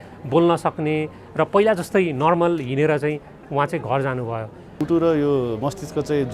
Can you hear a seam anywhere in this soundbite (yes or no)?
yes